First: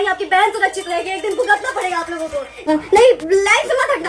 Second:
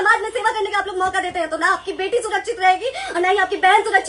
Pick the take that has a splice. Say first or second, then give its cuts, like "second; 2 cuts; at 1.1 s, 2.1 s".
first; 1 cut; at 2.7 s